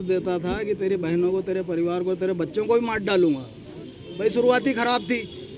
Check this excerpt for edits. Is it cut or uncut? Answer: uncut